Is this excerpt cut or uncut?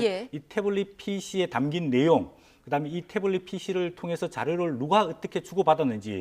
cut